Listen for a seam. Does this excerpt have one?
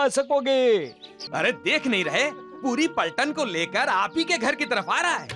yes; 1 cut; at 1.1 s

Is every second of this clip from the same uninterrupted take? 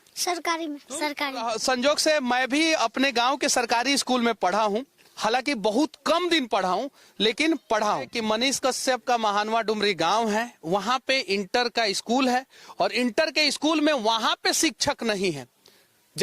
no; 2 cuts; at 1.5 s, 8.1 s

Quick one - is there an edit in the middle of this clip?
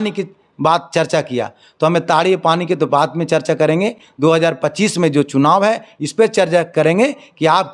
no; 0 cuts

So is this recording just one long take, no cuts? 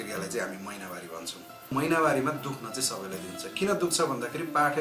no; 1 cut; at 1.7 s

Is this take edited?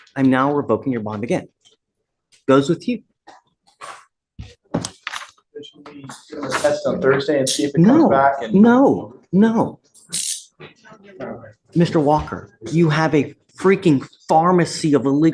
yes; 1 cut; at 7.4 s

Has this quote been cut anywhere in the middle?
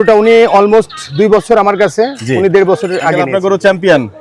yes; 1 cut; at 3.2 s

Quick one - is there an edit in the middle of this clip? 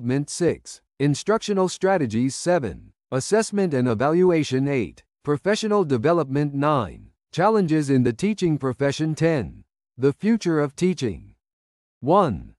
yes; 1 cut; at 11.5 s

